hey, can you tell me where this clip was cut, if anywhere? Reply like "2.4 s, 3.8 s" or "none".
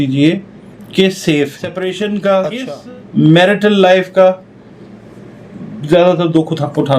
1.6 s